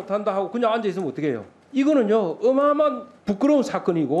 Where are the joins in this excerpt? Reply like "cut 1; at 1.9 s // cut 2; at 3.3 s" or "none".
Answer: cut 1; at 1.5 s // cut 2; at 3.1 s